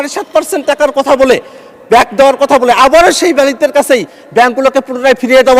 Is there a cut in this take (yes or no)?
no